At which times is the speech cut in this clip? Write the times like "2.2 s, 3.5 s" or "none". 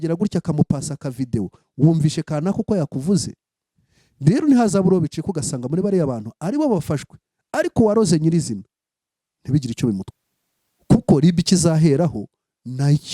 10.1 s